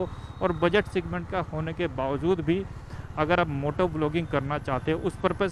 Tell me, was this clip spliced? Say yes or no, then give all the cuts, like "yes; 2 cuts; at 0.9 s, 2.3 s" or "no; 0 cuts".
no; 0 cuts